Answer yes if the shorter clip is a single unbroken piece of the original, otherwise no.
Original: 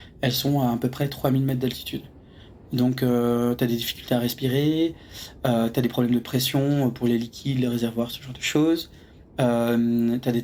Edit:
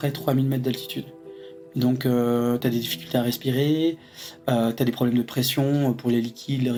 yes